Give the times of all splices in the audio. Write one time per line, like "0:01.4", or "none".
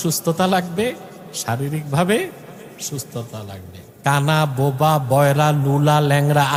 none